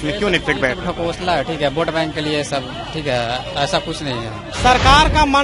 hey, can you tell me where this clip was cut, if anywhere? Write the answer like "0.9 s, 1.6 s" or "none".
4.4 s